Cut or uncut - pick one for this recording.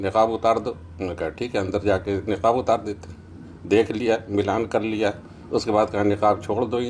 uncut